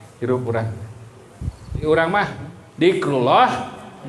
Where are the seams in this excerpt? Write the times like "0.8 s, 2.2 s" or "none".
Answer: 1.8 s